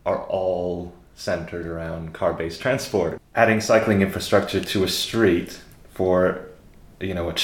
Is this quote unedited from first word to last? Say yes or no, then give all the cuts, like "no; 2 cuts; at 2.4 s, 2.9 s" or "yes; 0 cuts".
no; 1 cut; at 3.2 s